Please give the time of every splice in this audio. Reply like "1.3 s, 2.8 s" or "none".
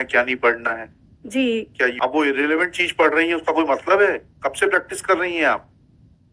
1.9 s